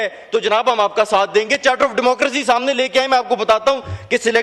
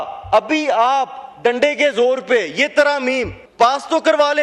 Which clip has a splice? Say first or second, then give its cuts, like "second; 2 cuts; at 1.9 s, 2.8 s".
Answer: second; 1 cut; at 3.4 s